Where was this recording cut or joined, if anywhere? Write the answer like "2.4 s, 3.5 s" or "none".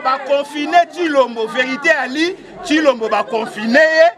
none